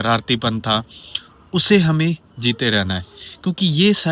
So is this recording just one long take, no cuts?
yes; 0 cuts

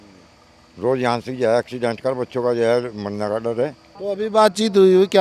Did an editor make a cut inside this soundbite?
yes; 1 cut; at 3.9 s

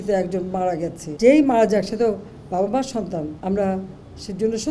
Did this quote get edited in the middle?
yes; 2 cuts; at 1.0 s, 3.3 s

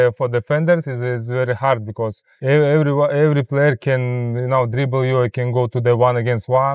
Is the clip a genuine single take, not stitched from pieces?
no; 1 cut; at 2.3 s

